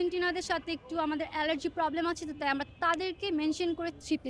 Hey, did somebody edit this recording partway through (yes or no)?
no